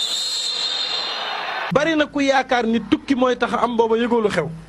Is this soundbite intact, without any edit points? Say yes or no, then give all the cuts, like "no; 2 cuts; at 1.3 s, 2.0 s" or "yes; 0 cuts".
no; 1 cut; at 1.7 s